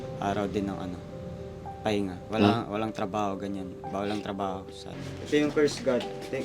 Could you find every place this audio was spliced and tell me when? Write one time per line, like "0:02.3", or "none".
0:05.0